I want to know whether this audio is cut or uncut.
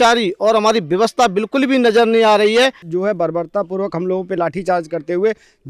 cut